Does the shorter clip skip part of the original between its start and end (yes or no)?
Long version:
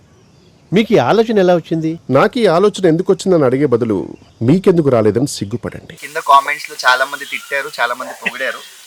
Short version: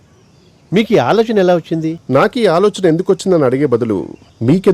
no